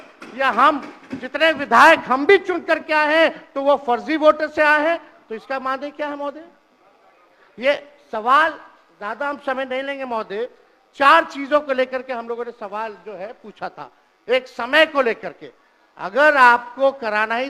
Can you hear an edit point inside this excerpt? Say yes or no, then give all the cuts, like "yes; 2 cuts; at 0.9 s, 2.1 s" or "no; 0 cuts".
no; 0 cuts